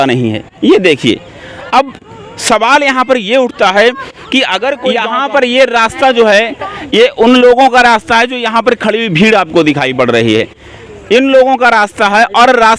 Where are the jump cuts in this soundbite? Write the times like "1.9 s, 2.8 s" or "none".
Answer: 5.0 s